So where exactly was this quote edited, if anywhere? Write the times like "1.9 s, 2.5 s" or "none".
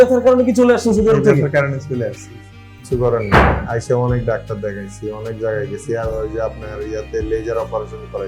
2.7 s